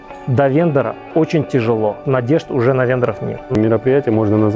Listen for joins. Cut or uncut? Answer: cut